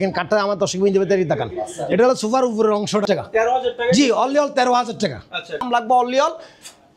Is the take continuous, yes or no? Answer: no